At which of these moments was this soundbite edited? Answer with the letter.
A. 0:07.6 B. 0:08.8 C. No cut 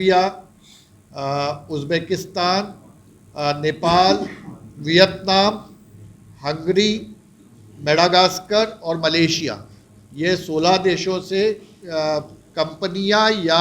C